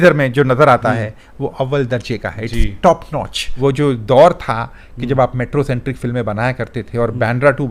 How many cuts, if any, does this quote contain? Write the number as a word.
one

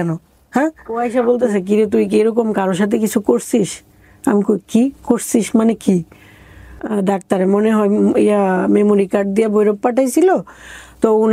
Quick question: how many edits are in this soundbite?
two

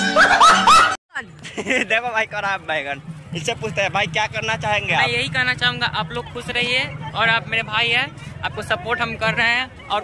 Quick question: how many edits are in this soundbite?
one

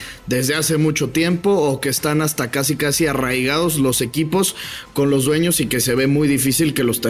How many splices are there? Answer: zero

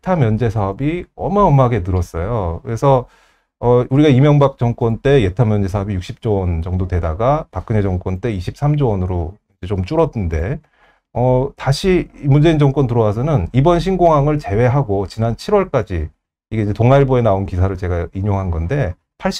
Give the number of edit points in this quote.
zero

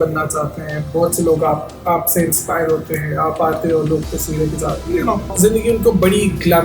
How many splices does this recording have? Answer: one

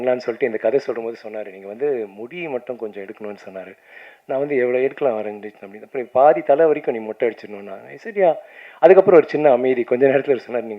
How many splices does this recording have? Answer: zero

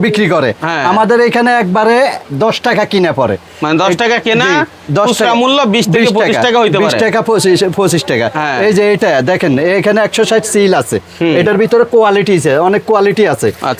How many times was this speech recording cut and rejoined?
zero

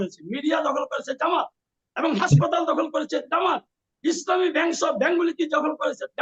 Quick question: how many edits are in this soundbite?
zero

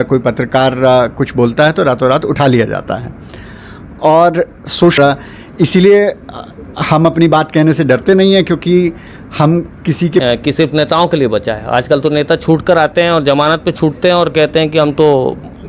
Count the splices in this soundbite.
two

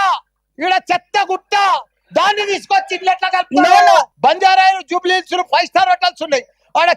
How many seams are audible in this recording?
one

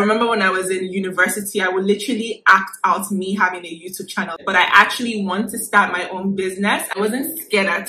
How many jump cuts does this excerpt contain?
two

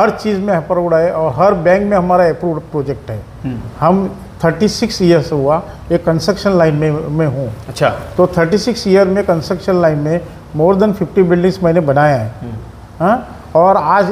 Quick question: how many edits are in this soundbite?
zero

